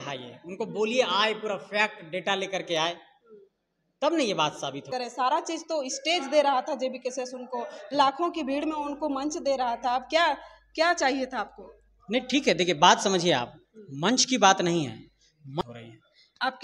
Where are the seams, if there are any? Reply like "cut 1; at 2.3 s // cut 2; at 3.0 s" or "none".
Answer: cut 1; at 4.9 s // cut 2; at 15.6 s